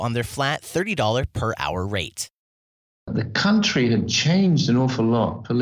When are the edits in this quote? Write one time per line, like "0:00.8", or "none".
0:03.0